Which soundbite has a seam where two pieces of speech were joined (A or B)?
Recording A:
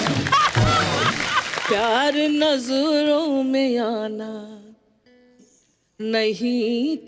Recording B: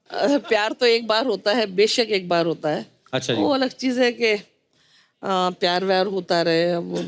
A